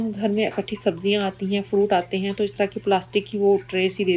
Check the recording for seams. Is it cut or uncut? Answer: uncut